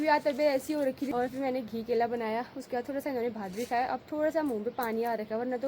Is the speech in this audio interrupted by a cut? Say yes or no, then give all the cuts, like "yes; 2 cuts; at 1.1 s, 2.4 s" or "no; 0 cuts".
yes; 1 cut; at 1.1 s